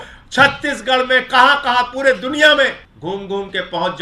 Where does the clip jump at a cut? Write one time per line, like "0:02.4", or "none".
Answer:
0:02.9